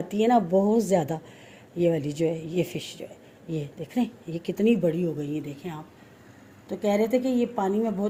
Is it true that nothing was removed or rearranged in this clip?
yes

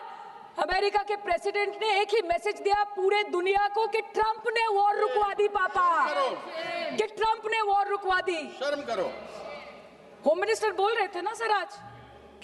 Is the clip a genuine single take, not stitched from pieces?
yes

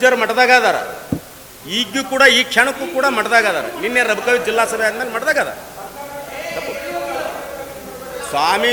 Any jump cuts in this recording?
no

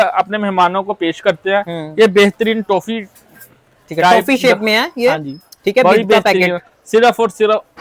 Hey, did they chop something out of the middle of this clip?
no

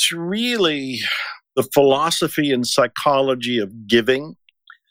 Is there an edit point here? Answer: yes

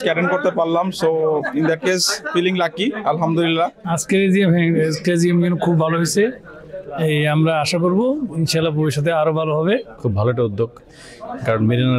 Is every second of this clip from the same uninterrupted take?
yes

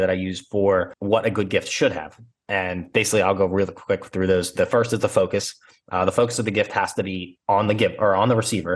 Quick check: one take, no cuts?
no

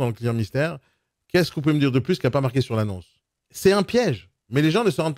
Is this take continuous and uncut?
yes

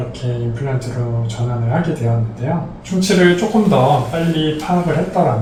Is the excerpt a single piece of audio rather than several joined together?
yes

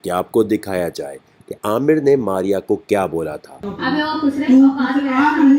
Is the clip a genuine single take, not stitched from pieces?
no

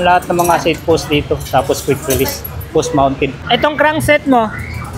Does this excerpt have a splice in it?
yes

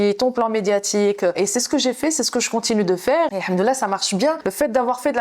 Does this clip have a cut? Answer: yes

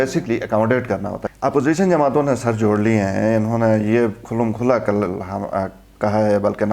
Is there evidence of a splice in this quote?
yes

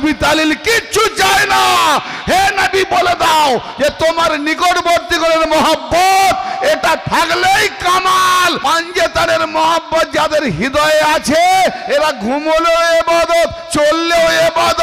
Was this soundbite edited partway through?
yes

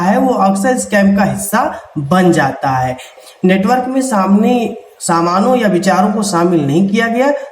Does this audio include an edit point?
yes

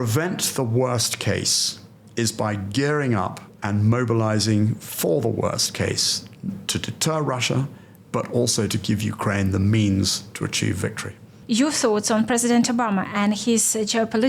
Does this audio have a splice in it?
no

